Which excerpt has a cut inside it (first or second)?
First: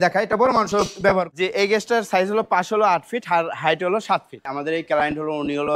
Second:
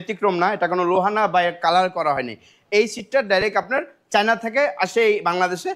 first